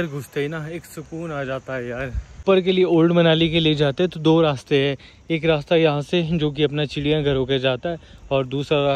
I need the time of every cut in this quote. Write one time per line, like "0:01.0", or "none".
0:02.4